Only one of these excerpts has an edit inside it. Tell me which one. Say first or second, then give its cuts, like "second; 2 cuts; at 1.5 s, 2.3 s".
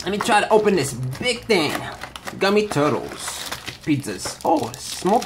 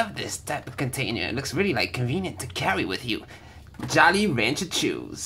first; 1 cut; at 4.1 s